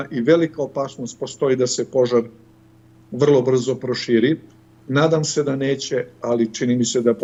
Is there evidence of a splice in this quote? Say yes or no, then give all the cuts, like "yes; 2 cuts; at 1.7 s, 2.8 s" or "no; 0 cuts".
no; 0 cuts